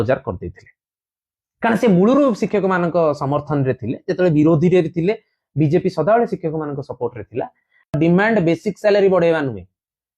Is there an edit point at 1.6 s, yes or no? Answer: no